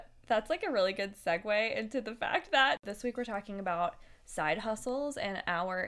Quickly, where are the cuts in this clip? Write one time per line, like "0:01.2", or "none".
0:02.8